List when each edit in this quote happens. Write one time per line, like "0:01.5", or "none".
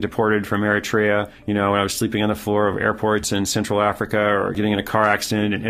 0:01.4
0:04.6

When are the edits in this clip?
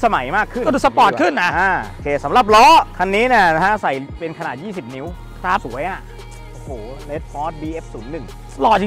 none

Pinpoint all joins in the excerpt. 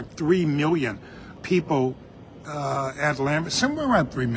0:02.4

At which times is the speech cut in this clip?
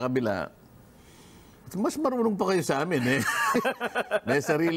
none

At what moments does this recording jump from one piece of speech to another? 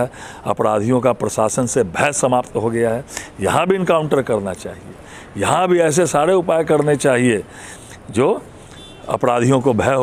none

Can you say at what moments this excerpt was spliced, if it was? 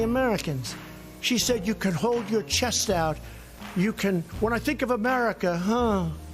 none

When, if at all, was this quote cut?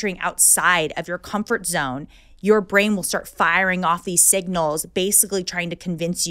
none

